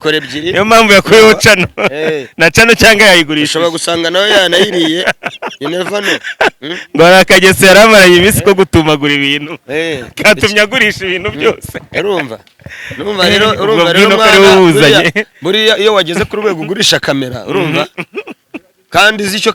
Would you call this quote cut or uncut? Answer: uncut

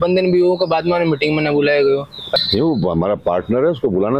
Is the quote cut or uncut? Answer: cut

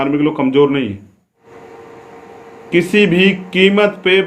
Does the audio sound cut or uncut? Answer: cut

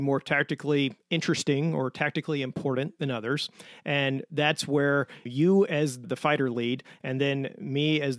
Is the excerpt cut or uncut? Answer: cut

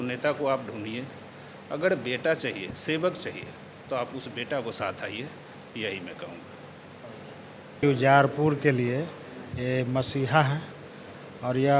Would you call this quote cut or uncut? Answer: cut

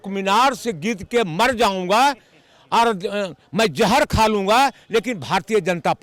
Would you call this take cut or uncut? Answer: uncut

